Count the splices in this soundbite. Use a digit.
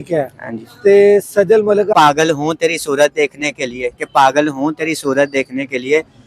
1